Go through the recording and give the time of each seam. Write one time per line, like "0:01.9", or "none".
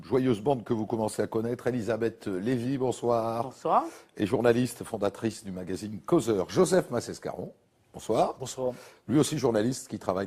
none